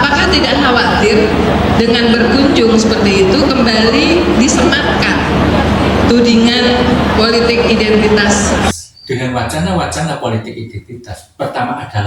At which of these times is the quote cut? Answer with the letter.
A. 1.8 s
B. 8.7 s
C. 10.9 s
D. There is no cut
B